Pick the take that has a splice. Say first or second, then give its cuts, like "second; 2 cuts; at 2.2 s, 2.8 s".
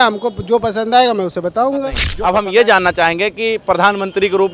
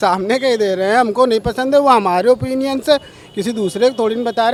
first; 1 cut; at 2.1 s